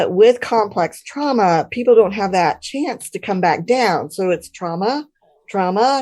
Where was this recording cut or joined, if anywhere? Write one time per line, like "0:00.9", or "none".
none